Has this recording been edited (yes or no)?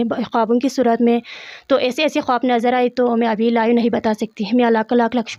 no